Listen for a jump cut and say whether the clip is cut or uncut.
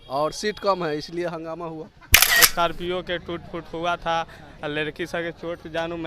cut